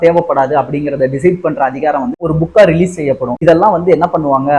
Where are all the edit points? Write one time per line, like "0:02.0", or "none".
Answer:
0:02.2